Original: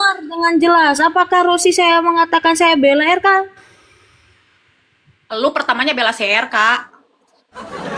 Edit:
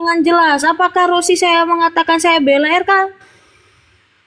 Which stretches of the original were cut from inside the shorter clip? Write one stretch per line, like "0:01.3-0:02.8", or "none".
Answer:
none